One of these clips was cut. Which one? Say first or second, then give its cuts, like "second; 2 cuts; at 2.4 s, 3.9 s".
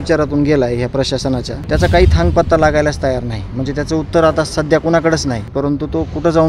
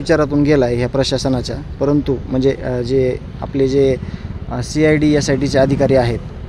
first; 2 cuts; at 1.5 s, 5.5 s